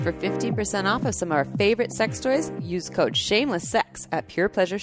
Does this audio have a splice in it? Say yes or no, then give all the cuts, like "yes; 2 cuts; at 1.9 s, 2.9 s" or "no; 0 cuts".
no; 0 cuts